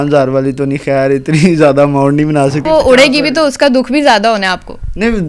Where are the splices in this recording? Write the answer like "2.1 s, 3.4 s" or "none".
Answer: 2.6 s